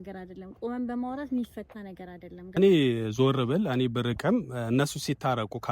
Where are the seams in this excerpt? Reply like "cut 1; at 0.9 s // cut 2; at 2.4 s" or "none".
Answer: cut 1; at 2.6 s